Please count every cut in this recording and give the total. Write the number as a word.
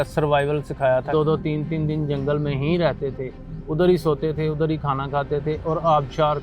one